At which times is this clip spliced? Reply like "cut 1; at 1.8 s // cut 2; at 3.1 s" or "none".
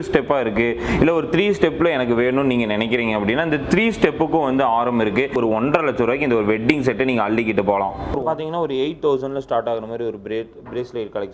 cut 1; at 5.4 s // cut 2; at 8.0 s